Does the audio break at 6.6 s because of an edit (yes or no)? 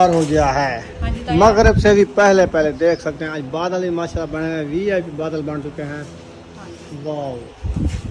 no